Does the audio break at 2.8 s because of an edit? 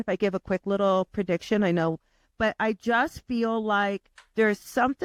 no; 0 cuts

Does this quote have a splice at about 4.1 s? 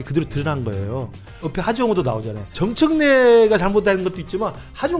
no; 2 cuts; at 1.5 s, 2.5 s

